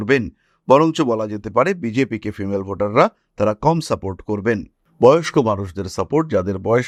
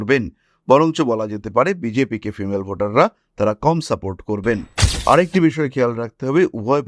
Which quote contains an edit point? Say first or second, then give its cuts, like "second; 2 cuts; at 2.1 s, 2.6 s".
second; 1 cut; at 4.8 s